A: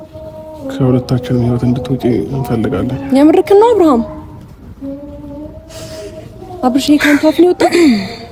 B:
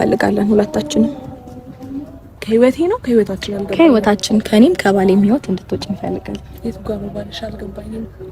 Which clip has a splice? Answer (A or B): B